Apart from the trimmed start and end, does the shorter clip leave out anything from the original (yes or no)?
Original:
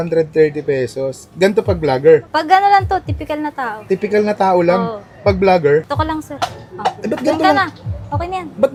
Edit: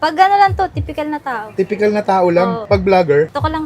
yes